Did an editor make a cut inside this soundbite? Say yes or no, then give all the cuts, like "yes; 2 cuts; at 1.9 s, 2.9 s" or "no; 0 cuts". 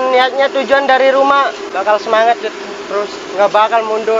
yes; 1 cut; at 1.7 s